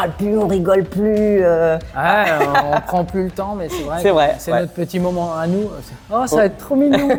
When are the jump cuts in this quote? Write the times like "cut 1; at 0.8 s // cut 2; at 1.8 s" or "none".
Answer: none